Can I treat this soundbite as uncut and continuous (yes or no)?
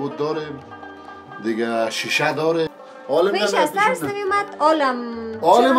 no